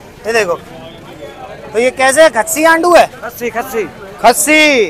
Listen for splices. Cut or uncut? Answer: uncut